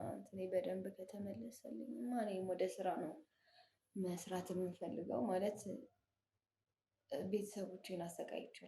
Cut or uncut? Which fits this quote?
uncut